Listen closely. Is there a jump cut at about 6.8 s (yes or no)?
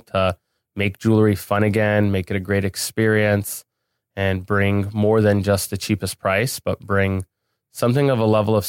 no